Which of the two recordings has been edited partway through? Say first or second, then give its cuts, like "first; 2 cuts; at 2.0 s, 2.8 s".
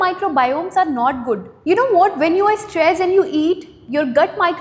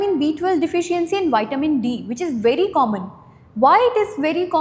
first; 1 cut; at 1.5 s